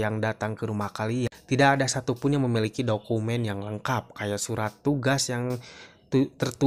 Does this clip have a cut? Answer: no; 0 cuts

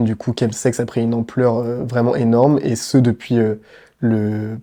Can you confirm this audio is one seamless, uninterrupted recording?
yes; 0 cuts

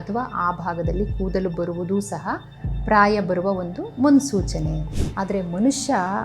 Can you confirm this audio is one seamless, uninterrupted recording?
no; 1 cut; at 5.0 s

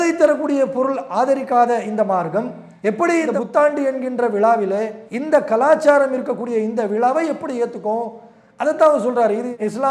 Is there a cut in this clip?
no; 0 cuts

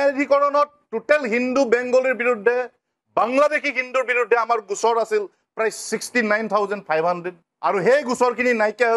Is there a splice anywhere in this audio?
no; 0 cuts

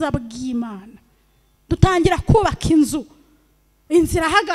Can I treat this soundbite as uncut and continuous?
yes; 0 cuts

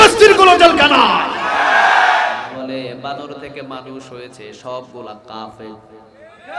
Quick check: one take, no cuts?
no; 1 cut; at 2.4 s

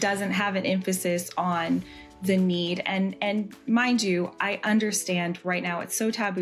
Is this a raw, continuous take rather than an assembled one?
yes; 0 cuts

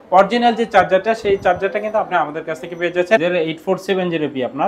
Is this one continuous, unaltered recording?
no; 1 cut; at 3.2 s

